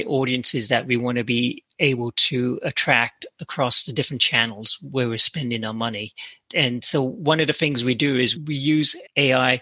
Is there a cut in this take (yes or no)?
yes